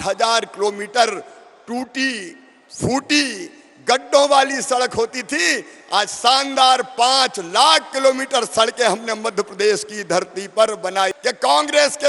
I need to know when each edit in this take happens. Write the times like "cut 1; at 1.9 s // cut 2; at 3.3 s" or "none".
cut 1; at 11.2 s